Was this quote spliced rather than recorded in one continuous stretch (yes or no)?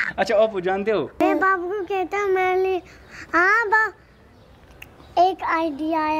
yes